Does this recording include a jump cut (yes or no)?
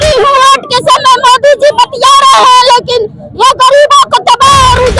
no